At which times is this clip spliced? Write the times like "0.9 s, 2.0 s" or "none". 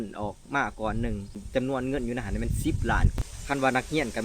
1.4 s, 3.3 s